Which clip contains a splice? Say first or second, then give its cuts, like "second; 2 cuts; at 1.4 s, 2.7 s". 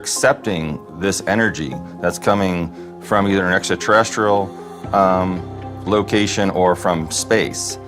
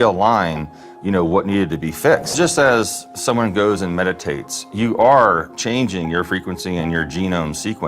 second; 1 cut; at 2.3 s